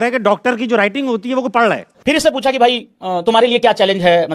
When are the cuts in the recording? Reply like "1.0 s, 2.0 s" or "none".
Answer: 1.9 s